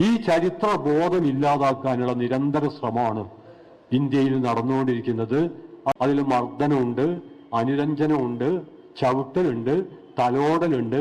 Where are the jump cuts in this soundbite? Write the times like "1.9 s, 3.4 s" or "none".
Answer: 6.0 s

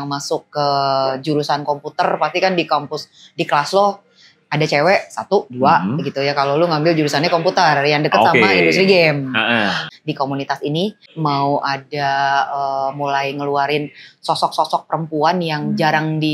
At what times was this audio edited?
9.8 s, 11.0 s

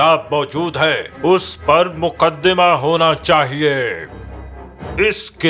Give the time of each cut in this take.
4.3 s

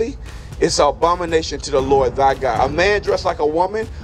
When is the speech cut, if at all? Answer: 2.6 s

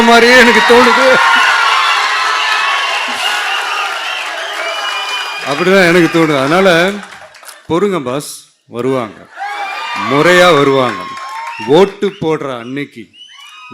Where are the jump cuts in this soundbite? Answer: none

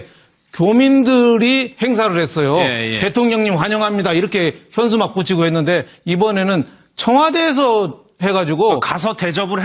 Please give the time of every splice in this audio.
none

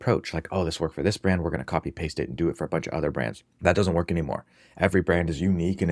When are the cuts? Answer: 3.4 s

